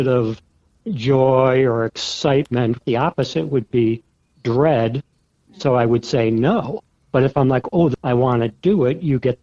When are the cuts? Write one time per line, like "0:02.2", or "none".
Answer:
0:02.8
0:07.9